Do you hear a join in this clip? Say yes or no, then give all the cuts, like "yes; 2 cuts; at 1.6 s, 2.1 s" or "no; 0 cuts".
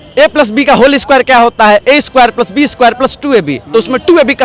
no; 0 cuts